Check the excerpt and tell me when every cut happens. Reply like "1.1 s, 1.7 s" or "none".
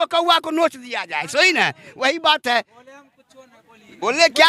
none